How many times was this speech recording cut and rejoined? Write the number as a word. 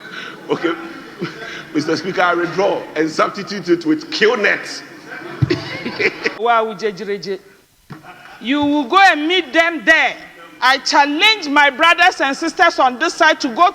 one